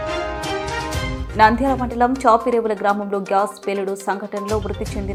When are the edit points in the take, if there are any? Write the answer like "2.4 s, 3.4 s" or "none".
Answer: none